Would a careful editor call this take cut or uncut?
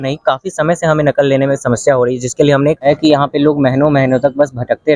cut